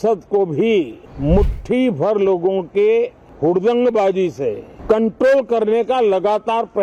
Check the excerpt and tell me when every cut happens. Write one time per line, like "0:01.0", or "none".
0:01.0
0:03.2
0:04.7

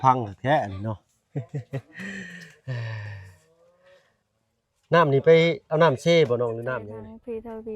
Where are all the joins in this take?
0:06.8

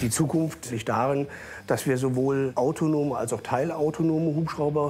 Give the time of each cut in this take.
0:02.5

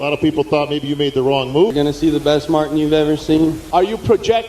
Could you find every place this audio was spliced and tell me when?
0:01.7
0:03.6

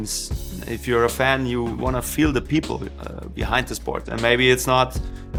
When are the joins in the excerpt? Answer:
none

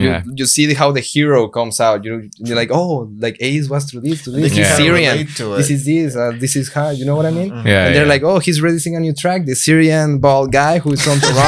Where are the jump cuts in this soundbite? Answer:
none

